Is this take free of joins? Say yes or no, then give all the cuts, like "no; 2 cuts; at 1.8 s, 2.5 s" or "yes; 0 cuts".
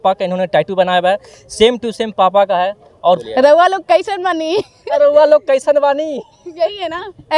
no; 1 cut; at 3.2 s